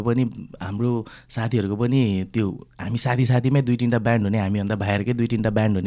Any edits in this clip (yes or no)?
no